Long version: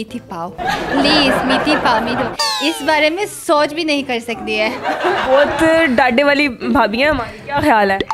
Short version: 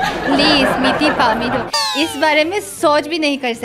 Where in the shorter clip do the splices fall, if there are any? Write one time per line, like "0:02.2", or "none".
none